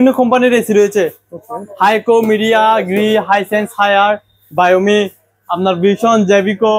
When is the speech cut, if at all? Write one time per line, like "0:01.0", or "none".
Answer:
none

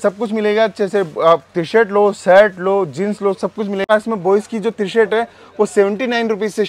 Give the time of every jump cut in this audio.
0:03.8

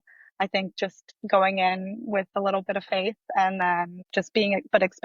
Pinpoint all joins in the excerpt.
0:01.1
0:02.3
0:04.0

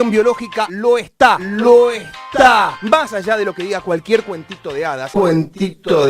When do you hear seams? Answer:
0:02.8

